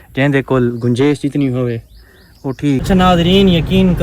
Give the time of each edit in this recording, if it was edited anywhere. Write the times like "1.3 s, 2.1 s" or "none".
2.8 s